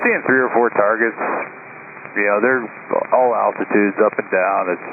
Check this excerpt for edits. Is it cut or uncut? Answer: uncut